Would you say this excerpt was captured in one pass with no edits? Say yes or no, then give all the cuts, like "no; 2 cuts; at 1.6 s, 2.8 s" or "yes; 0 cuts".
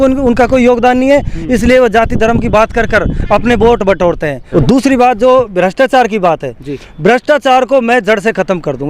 no; 1 cut; at 4.3 s